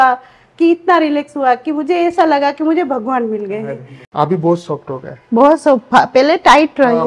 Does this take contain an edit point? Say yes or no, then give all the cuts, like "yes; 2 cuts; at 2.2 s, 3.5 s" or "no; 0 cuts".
yes; 1 cut; at 4.0 s